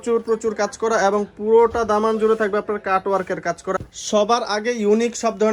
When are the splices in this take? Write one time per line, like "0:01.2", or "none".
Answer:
0:03.8